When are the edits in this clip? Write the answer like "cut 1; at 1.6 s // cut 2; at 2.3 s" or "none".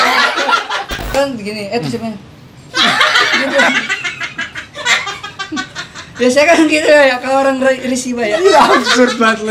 cut 1; at 1.0 s